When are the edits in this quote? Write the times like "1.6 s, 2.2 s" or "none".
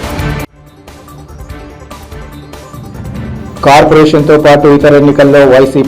none

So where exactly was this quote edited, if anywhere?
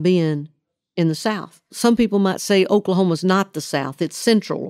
1.7 s

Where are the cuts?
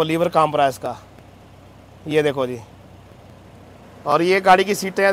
none

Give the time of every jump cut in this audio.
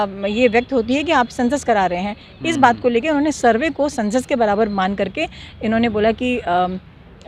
none

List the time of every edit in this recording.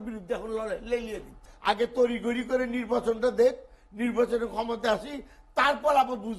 1.5 s

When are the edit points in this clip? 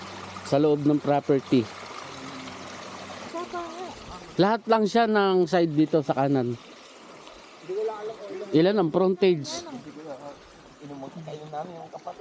3.3 s

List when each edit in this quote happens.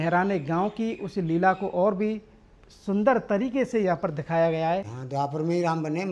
5.0 s

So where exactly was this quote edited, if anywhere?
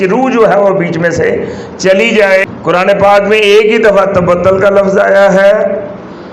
2.5 s

